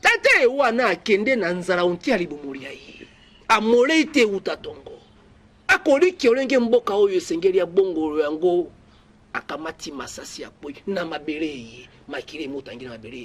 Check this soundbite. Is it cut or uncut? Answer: uncut